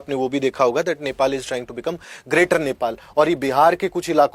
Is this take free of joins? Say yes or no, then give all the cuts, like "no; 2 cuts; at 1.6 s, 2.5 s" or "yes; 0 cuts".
yes; 0 cuts